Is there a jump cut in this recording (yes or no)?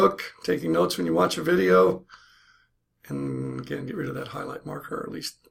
no